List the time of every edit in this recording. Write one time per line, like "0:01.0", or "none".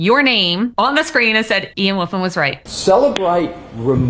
0:00.7
0:01.7
0:02.6